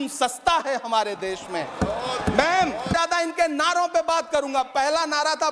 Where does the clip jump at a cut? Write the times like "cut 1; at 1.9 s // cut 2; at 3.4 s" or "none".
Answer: cut 1; at 2.9 s